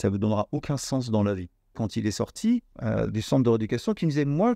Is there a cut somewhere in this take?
yes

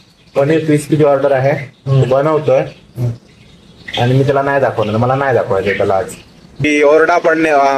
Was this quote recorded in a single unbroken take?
no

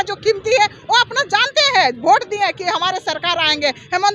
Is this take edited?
no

